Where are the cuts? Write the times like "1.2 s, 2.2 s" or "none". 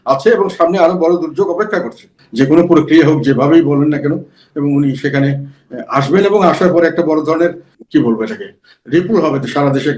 2.2 s, 7.7 s